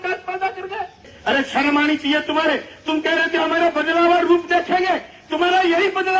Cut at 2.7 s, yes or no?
no